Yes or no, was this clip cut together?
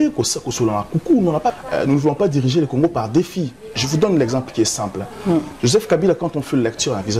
yes